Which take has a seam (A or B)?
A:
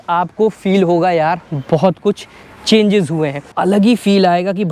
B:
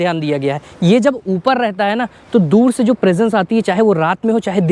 A